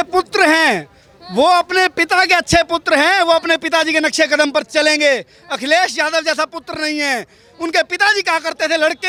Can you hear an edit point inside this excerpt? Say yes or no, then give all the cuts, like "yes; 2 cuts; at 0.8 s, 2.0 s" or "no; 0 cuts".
no; 0 cuts